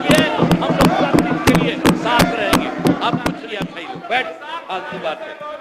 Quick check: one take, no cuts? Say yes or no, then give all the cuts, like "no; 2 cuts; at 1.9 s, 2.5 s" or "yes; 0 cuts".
no; 1 cut; at 3.5 s